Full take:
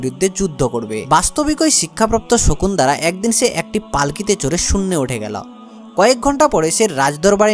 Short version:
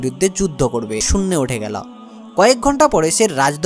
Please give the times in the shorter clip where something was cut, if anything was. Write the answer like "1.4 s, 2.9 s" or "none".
1.0 s